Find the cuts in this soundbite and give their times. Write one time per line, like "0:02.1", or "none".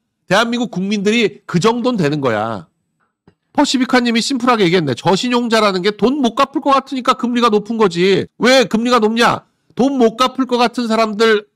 none